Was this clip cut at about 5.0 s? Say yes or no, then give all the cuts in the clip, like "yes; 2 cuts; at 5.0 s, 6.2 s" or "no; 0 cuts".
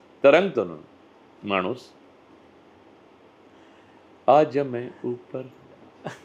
no; 0 cuts